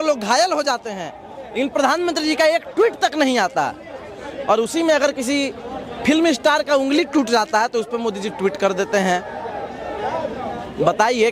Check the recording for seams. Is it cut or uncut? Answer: uncut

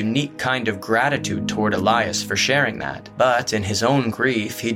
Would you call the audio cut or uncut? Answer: cut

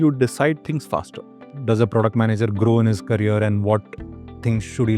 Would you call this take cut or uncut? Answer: cut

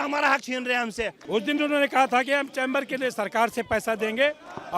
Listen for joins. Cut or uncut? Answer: cut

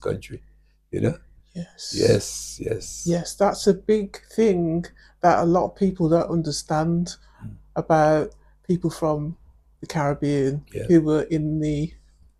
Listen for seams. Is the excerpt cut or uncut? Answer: uncut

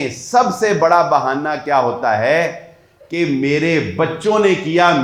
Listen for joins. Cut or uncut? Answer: uncut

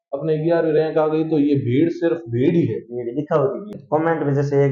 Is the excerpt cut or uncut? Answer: cut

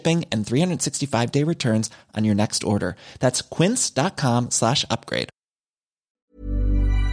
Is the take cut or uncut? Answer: cut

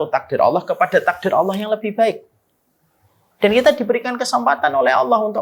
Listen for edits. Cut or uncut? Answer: uncut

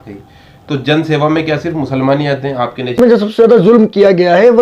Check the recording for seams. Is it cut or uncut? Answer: cut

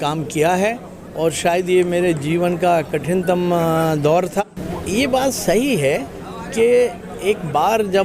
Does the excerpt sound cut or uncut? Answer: cut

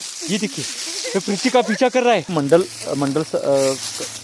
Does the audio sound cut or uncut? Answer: cut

